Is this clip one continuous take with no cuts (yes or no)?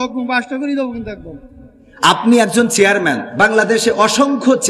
no